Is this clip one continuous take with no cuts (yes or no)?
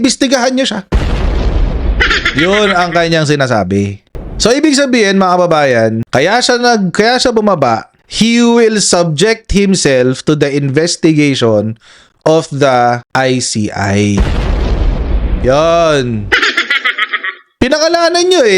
no